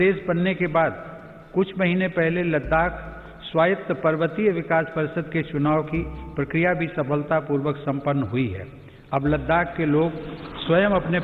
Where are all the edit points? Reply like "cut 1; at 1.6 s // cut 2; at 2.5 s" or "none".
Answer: none